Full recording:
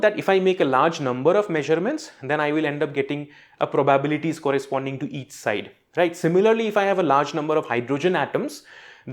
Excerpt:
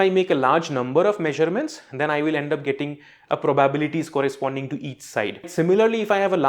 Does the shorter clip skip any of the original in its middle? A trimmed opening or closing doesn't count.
yes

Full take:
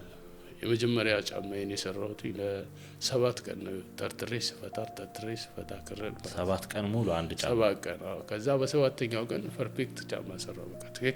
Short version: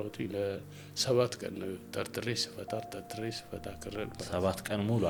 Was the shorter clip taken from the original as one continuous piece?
yes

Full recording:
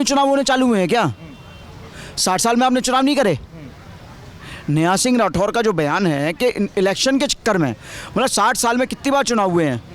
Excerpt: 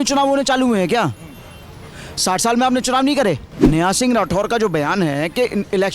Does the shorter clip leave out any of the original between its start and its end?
yes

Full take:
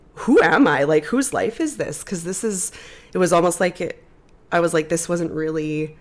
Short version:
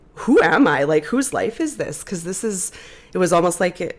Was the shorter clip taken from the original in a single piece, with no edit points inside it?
yes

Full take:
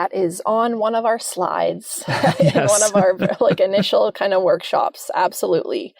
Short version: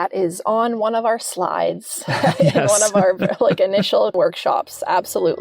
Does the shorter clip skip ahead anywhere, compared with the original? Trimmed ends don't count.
yes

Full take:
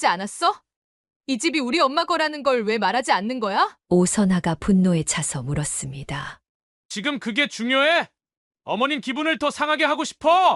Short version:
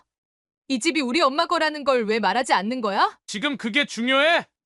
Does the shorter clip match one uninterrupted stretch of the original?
no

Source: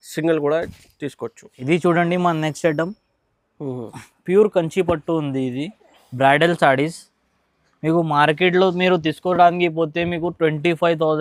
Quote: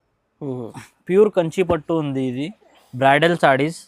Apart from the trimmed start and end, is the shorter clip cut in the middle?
no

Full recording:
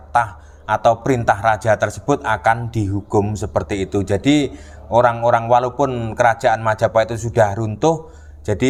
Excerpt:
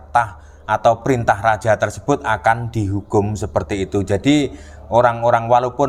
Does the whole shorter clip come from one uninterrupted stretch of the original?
yes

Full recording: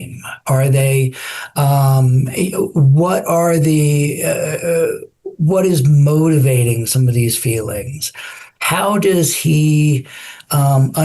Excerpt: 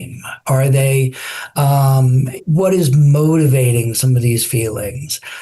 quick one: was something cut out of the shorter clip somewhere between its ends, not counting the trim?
yes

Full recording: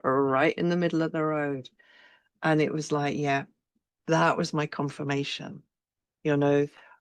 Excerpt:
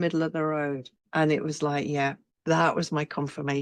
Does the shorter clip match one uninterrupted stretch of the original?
no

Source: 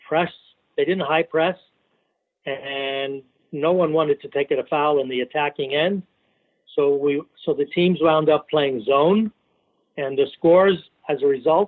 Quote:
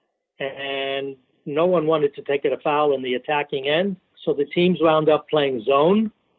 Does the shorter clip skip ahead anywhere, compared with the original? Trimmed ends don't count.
yes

